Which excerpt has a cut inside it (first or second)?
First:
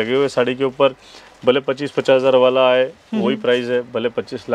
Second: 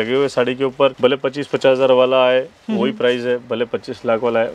second